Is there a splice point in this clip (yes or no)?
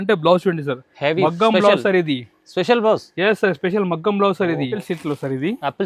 yes